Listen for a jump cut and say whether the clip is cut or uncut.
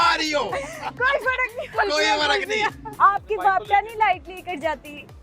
cut